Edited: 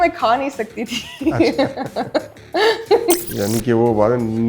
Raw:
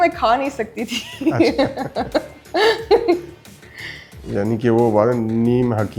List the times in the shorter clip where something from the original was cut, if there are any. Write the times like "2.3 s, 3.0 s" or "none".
3.3 s